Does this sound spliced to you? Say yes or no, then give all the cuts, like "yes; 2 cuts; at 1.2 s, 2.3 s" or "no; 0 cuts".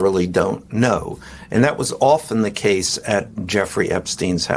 no; 0 cuts